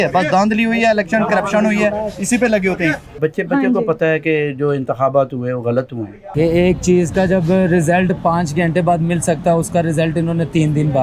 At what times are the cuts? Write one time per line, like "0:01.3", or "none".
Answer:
0:03.2
0:06.3